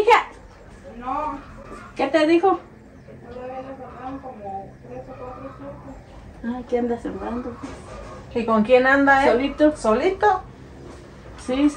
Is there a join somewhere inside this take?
no; 0 cuts

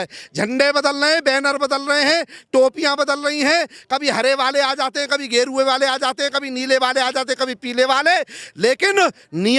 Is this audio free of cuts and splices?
yes; 0 cuts

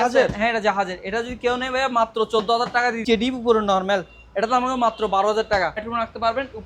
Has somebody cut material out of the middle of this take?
yes; 2 cuts; at 3.0 s, 5.8 s

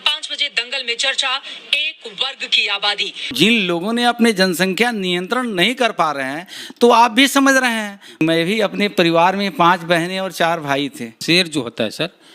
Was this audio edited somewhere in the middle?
yes; 3 cuts; at 3.3 s, 8.2 s, 11.1 s

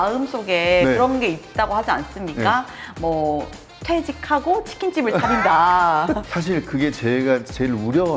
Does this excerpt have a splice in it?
yes; 1 cut; at 6.2 s

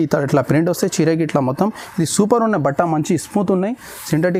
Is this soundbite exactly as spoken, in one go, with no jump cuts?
yes; 0 cuts

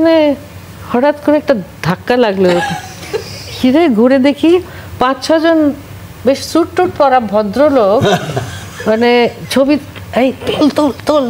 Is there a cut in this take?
no; 0 cuts

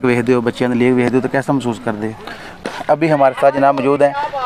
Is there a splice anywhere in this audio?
yes; 1 cut; at 2.6 s

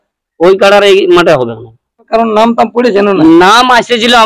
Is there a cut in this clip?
yes; 1 cut; at 2.1 s

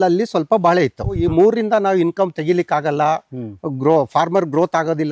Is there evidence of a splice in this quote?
yes; 1 cut; at 1.2 s

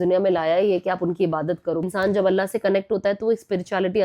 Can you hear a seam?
yes; 1 cut; at 1.8 s

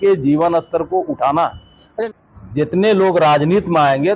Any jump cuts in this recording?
yes; 1 cut; at 2.0 s

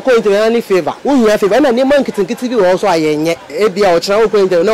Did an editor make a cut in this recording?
yes; 2 cuts; at 0.9 s, 3.5 s

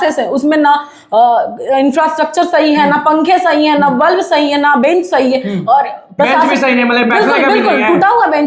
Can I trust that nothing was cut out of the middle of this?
yes; 0 cuts

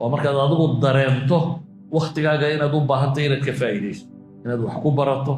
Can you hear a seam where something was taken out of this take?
no; 0 cuts

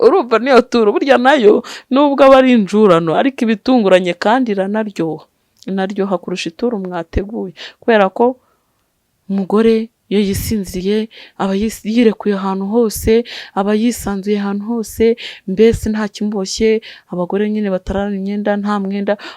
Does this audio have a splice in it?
no; 0 cuts

